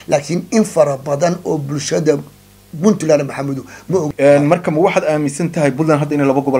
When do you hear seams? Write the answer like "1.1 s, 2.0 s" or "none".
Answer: 4.1 s